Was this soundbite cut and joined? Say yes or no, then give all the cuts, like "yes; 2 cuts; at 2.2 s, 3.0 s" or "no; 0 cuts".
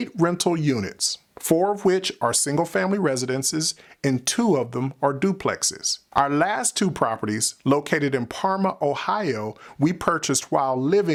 no; 0 cuts